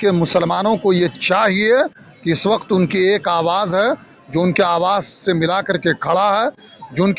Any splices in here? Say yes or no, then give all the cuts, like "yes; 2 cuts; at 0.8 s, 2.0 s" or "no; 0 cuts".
no; 0 cuts